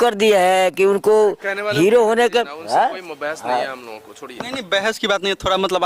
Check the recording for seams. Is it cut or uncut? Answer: uncut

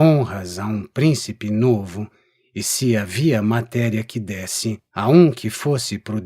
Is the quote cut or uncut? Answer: cut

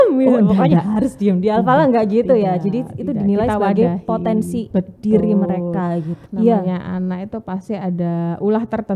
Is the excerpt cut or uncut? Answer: cut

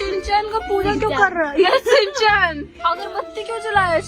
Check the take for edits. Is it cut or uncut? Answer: uncut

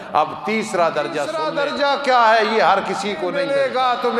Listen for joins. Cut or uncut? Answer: cut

